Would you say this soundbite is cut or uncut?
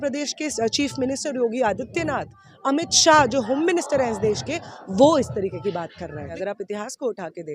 uncut